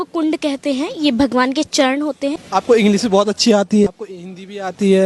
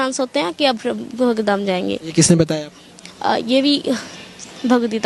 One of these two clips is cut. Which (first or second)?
first